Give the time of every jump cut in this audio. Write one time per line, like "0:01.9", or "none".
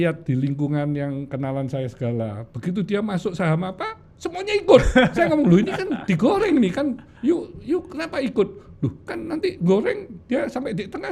none